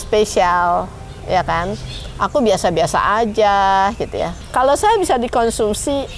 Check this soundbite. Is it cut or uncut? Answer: cut